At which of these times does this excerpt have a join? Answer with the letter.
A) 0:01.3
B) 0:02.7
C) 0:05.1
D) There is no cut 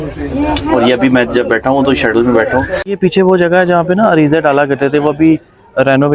B